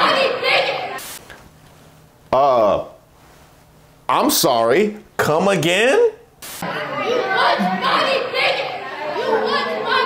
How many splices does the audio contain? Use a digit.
0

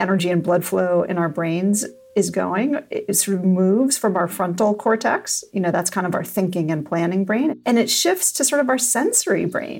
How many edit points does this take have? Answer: 3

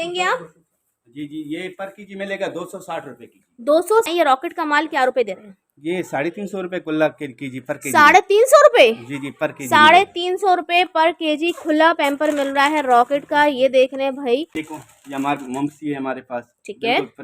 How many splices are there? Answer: 2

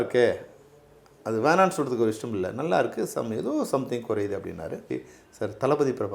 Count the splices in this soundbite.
1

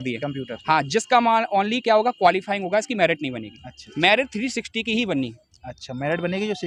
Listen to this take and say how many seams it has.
0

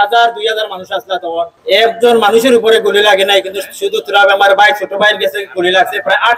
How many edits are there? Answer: 1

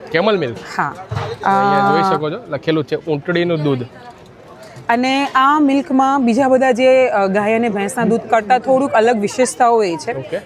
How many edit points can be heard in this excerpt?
0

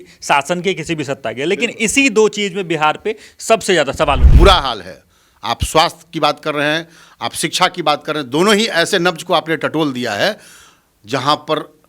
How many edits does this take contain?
1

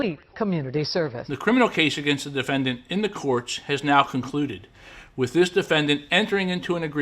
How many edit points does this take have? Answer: 1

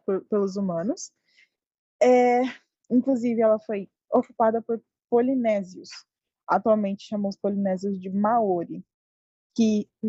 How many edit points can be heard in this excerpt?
0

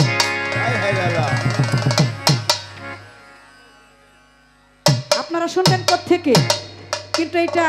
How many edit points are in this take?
0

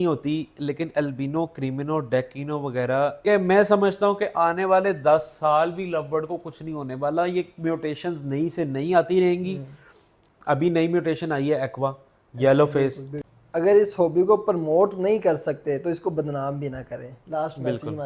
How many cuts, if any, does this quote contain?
2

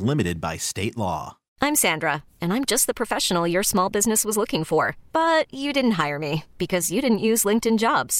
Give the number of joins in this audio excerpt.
1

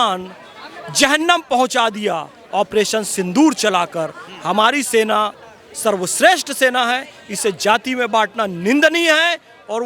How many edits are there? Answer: 0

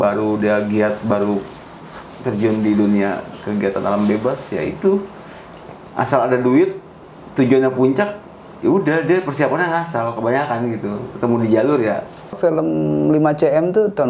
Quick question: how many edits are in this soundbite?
1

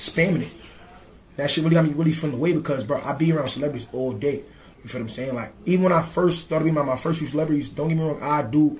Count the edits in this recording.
1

